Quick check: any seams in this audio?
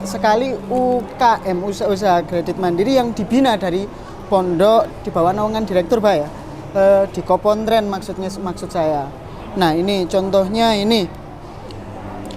yes; 1 cut; at 4.9 s

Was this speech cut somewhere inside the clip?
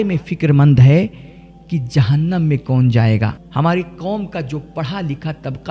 yes; 1 cut; at 3.4 s

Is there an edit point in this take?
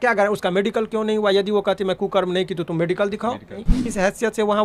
yes; 1 cut; at 3.8 s

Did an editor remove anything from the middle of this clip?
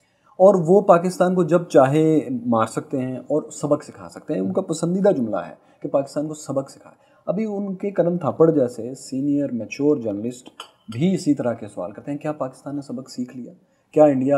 no; 0 cuts

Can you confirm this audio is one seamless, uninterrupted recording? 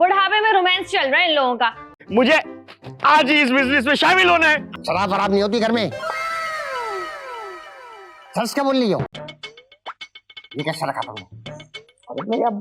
no; 3 cuts; at 1.9 s, 4.7 s, 9.1 s

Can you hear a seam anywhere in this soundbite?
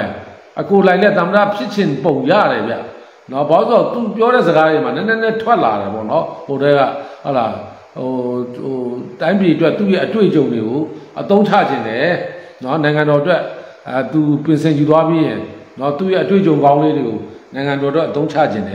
no; 0 cuts

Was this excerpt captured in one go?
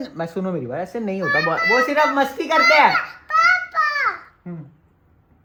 yes; 0 cuts

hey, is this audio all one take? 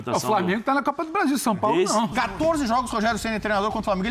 no; 1 cut; at 2.1 s

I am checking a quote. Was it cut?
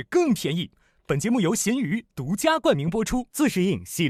no; 0 cuts

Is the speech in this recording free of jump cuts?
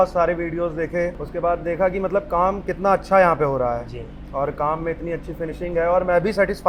yes; 0 cuts

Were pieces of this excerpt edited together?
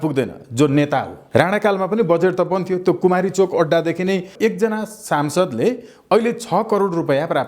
yes; 2 cuts; at 1.2 s, 4.3 s

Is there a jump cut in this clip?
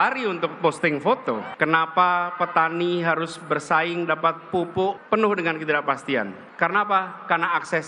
yes; 2 cuts; at 1.4 s, 5.2 s

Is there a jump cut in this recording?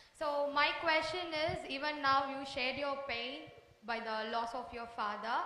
no; 0 cuts

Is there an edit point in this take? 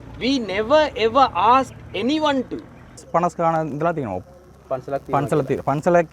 yes; 1 cut; at 3.0 s

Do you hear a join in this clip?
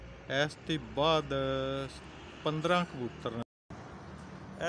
yes; 1 cut; at 3.4 s

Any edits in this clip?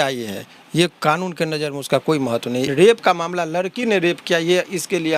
yes; 1 cut; at 2.7 s

